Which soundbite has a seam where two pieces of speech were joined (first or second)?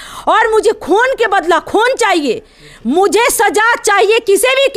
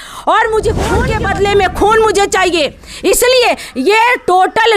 second